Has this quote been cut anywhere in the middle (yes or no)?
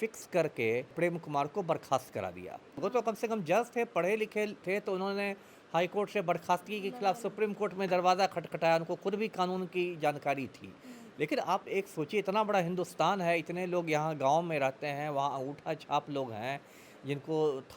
yes